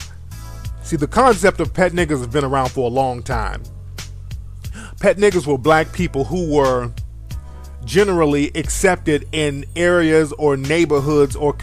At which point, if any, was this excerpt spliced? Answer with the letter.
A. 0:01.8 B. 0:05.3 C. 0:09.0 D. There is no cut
D